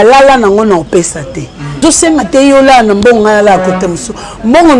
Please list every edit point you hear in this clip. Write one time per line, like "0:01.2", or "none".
0:01.8